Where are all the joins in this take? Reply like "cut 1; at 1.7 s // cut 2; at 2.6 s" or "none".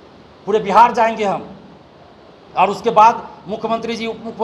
none